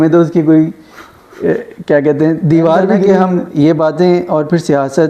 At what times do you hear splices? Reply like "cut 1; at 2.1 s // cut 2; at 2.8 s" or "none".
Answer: cut 1; at 3.1 s